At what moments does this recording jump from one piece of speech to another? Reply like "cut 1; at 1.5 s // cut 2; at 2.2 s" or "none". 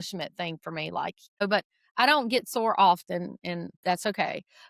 cut 1; at 1.4 s // cut 2; at 3.7 s